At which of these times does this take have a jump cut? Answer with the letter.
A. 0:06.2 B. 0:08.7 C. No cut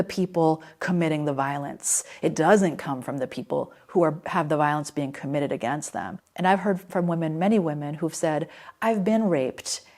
A